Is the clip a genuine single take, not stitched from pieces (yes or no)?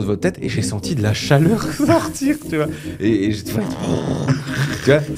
yes